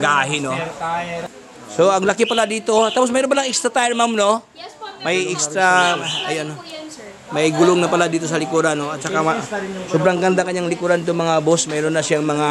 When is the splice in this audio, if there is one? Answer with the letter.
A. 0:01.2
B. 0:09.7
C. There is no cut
A